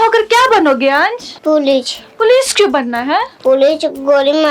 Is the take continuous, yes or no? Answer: no